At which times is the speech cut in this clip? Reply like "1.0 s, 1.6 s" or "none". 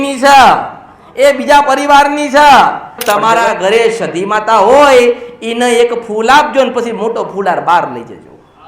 3.0 s